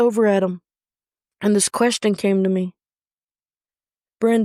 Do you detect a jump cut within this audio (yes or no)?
no